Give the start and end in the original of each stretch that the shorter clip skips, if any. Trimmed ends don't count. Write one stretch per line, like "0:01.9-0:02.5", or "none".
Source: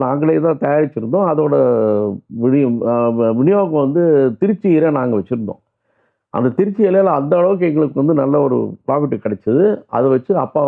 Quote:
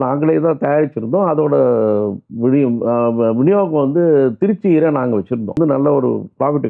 0:05.6-0:08.1